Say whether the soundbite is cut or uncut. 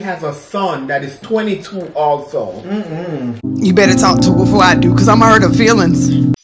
uncut